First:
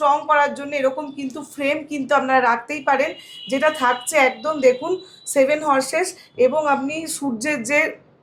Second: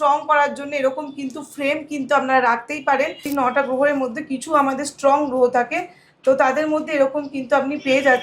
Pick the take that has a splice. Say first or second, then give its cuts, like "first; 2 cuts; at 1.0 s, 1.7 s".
second; 1 cut; at 3.3 s